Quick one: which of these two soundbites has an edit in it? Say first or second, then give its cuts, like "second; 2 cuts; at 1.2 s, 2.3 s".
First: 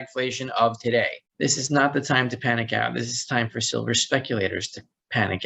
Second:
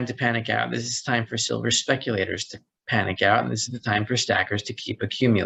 first; 1 cut; at 1.2 s